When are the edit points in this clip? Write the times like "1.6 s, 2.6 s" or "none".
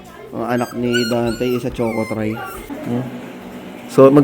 2.7 s